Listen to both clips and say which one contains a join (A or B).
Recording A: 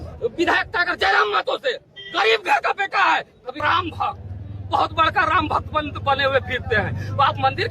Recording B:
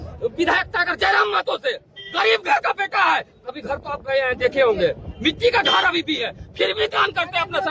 A